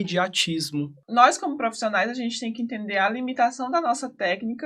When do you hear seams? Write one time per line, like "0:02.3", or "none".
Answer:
0:01.0